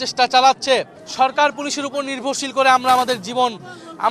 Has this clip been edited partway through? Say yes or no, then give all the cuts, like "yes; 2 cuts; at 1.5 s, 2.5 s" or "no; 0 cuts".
yes; 1 cut; at 1.0 s